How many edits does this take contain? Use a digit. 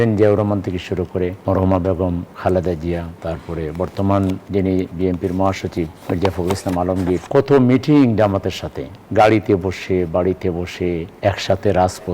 7